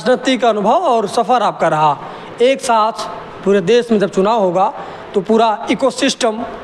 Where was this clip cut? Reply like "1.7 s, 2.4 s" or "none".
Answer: none